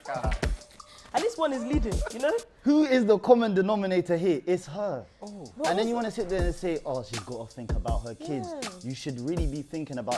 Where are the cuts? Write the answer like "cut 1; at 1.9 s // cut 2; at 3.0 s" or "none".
none